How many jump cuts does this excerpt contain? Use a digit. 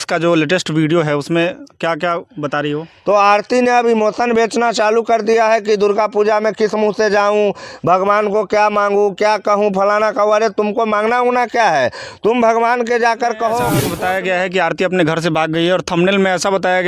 2